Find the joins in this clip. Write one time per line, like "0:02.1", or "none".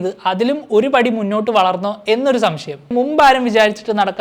0:02.9